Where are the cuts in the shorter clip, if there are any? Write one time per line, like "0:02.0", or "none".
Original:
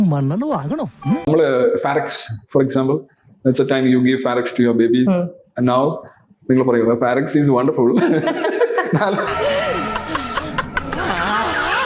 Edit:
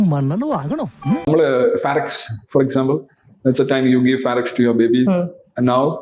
none